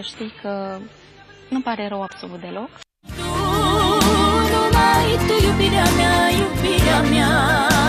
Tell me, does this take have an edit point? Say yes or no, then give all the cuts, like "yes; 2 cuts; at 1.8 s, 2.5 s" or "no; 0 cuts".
yes; 1 cut; at 5.4 s